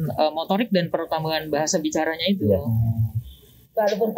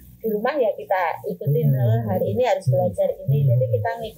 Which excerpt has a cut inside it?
first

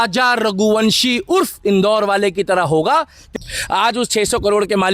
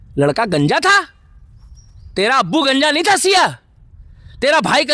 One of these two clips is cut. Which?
first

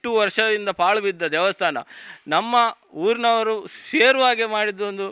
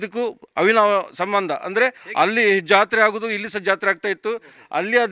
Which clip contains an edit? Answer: second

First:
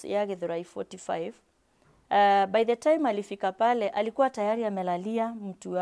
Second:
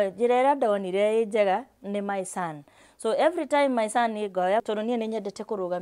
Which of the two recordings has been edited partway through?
second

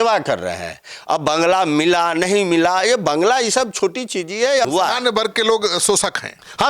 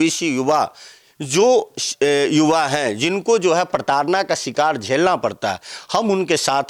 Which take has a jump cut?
first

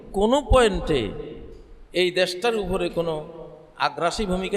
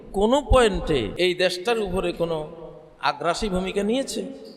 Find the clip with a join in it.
second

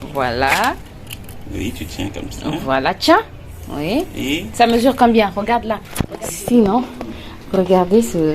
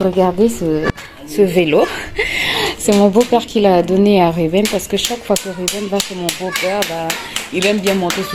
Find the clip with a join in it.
first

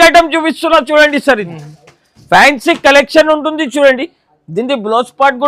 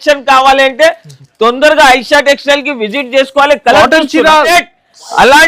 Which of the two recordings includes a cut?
second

